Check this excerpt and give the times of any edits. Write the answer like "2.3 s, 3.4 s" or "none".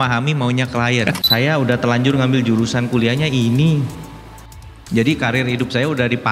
1.2 s